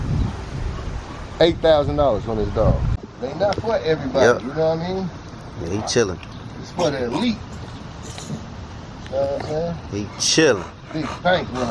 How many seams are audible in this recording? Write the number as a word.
one